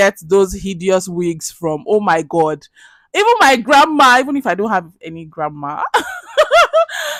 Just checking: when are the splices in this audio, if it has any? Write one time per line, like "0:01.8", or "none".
none